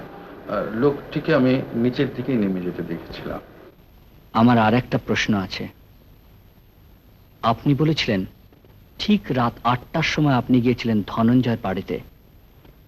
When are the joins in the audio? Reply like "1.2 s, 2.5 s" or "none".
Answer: none